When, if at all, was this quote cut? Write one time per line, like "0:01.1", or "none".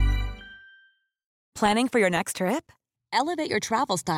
0:01.3

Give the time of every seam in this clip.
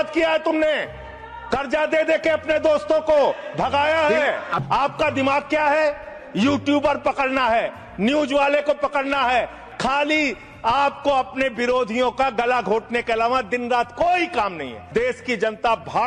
0:04.5
0:09.6
0:14.8

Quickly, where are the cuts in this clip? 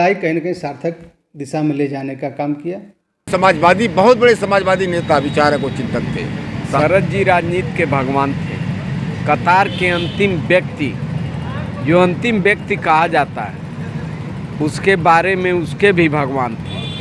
0:03.3
0:06.8

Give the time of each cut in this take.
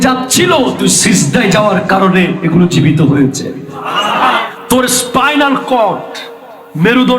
0:04.4

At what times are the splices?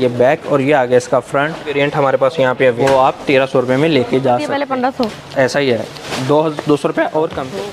0:01.7
0:02.8
0:04.6

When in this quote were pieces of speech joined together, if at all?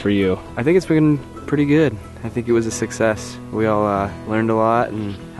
none

